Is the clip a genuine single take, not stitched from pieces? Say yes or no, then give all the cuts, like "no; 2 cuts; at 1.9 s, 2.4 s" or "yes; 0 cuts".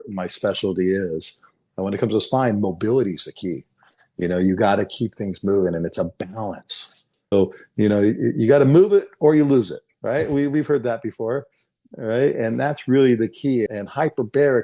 no; 1 cut; at 7.3 s